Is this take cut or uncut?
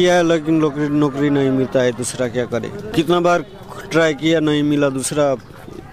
cut